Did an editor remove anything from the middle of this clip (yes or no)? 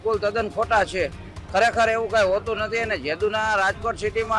no